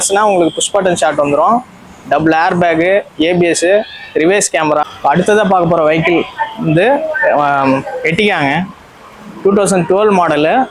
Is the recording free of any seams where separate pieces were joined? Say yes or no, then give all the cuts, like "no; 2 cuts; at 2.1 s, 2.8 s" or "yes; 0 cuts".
no; 1 cut; at 4.9 s